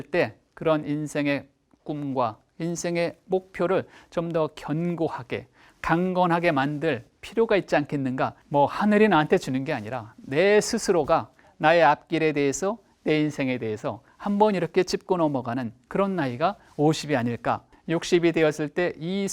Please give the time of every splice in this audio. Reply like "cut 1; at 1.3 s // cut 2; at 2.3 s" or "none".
cut 1; at 8.4 s // cut 2; at 17.7 s